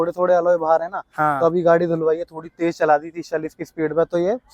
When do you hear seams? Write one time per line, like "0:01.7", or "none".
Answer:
none